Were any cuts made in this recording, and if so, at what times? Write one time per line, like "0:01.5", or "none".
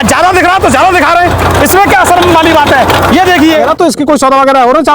0:03.8

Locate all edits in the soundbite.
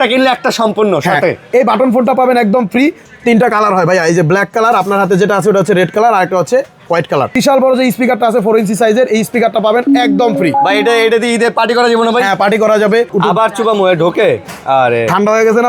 0:03.1
0:07.3
0:13.1

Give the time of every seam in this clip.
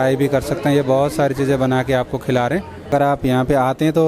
0:02.9

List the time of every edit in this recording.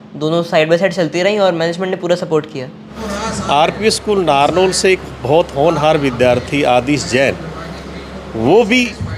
0:03.0

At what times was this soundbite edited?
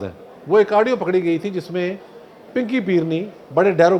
none

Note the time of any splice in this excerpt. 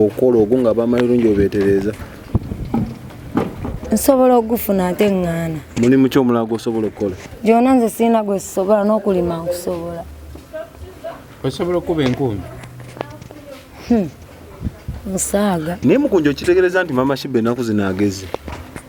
none

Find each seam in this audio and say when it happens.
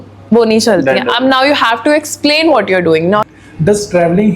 0:03.2

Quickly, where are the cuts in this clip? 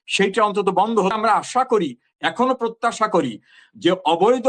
0:01.1

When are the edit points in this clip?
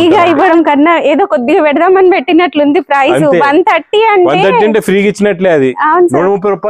none

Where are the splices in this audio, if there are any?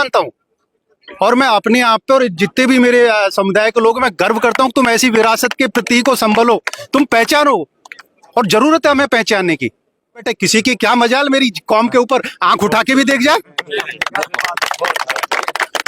0:10.3

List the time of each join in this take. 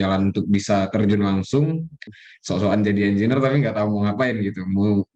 0:02.2

